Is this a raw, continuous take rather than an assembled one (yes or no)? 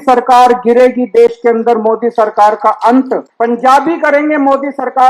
no